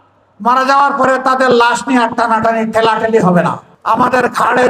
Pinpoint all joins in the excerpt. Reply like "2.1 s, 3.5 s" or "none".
3.7 s